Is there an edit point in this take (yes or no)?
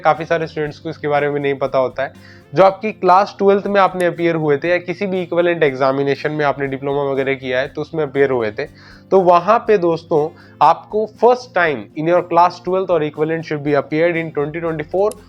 no